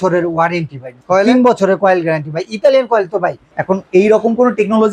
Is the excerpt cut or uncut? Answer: cut